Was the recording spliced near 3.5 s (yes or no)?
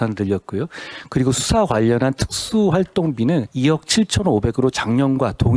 yes